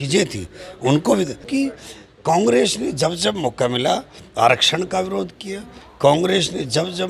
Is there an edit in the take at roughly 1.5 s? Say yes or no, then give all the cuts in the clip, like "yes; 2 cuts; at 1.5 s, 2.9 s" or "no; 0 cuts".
yes; 1 cut; at 1.5 s